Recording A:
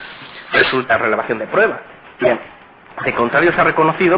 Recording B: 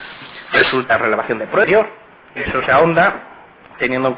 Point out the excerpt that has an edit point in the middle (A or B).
A